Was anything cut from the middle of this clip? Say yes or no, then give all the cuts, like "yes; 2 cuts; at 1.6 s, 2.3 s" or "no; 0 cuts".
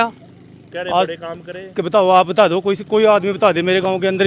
no; 0 cuts